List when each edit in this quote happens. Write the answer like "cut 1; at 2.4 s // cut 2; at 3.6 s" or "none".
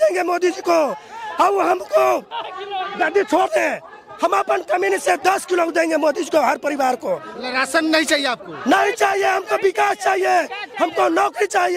none